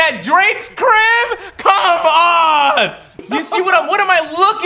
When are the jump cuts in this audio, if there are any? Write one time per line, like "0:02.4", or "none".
0:03.1